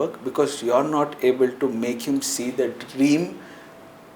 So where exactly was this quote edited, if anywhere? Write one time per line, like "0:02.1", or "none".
none